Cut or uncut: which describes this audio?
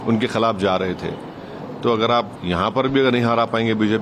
cut